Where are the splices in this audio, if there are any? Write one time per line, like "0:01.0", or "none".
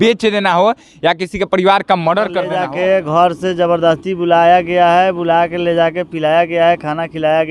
0:02.5

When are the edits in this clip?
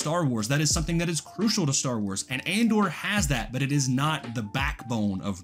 none

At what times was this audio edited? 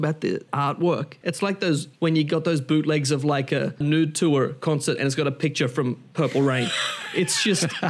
0:01.1
0:03.8

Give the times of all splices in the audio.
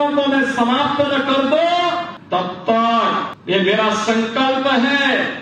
0:02.1
0:03.3

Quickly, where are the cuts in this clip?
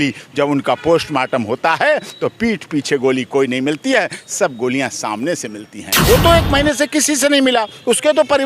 0:06.0

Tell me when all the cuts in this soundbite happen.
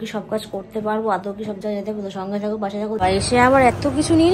0:03.0

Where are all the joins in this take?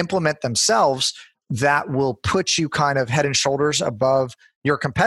none

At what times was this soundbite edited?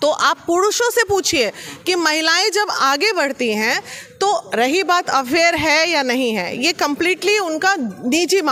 none

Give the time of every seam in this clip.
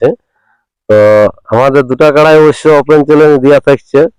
none

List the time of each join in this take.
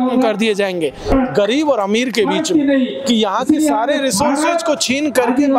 0:01.1

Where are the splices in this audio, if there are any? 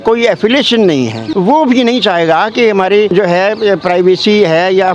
0:01.2
0:03.1

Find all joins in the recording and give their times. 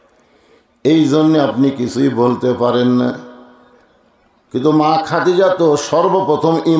none

